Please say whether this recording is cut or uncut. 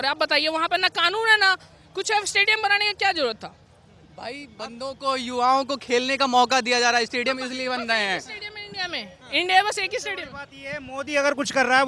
uncut